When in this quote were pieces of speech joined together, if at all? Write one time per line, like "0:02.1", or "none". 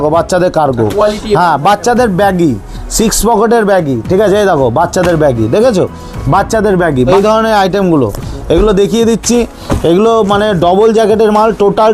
0:07.1